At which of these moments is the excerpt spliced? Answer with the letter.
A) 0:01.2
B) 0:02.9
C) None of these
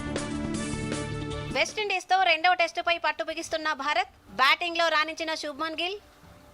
A